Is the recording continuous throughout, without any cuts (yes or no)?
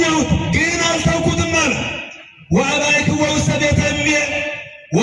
yes